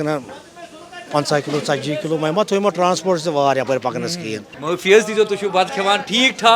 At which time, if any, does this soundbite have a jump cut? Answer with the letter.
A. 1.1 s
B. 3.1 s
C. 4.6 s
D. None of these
C